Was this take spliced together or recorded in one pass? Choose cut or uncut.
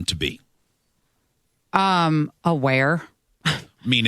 cut